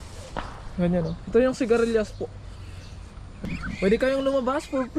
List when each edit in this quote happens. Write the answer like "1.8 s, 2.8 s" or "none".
3.5 s